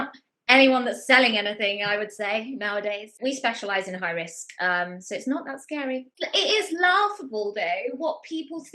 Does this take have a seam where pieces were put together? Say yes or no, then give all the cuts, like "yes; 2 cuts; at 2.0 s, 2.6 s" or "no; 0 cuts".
yes; 2 cuts; at 3.1 s, 6.1 s